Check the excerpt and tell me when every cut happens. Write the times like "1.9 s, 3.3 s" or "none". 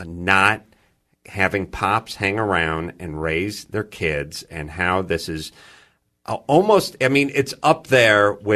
5.1 s